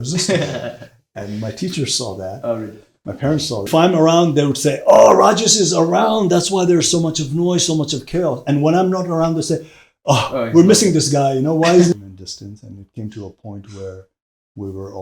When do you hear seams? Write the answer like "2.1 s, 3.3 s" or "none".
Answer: 3.6 s, 12.0 s

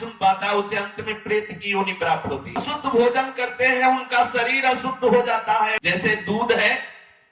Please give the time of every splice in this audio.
2.6 s, 5.7 s

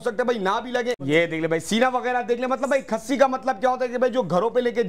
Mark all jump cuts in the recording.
1.0 s

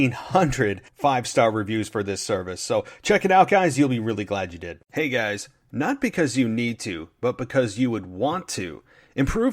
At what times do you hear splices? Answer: 4.7 s

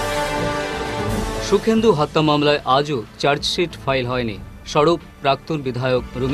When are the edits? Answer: none

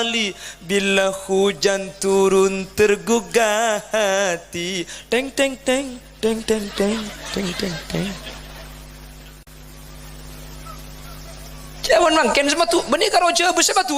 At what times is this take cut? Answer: 9.5 s

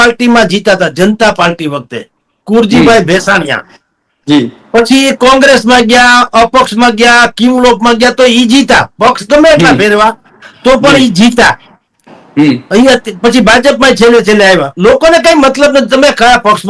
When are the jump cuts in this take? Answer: none

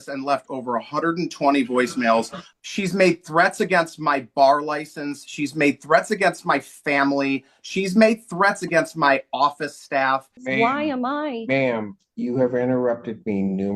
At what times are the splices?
2.4 s, 10.4 s

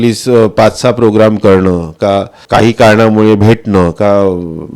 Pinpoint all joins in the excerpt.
2.4 s

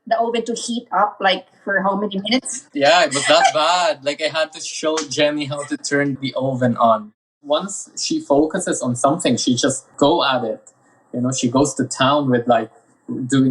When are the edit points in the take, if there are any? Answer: 2.6 s, 7.3 s

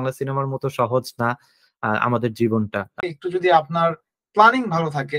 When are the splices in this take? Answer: 2.9 s

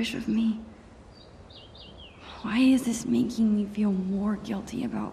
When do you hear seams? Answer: none

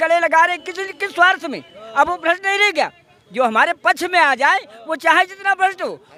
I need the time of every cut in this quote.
none

